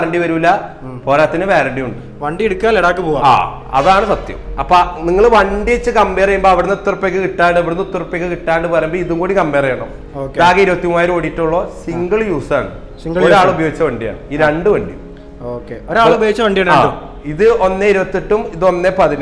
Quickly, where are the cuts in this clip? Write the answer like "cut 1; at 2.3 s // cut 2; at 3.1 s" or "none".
none